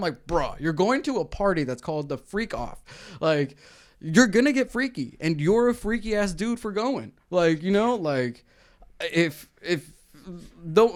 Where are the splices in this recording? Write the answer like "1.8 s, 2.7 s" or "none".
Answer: none